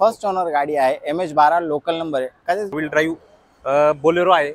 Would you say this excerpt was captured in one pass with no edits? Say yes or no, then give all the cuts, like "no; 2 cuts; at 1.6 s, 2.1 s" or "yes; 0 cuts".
no; 1 cut; at 2.7 s